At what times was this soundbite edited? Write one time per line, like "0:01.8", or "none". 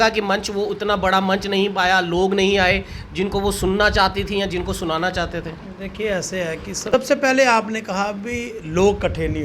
none